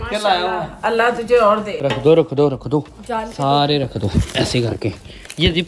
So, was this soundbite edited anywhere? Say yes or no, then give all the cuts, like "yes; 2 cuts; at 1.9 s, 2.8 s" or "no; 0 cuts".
yes; 1 cut; at 1.7 s